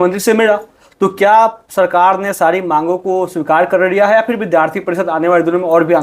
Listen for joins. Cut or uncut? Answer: uncut